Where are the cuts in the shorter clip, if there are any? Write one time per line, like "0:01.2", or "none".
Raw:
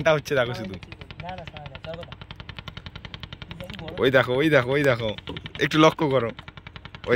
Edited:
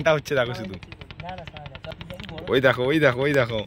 0:01.9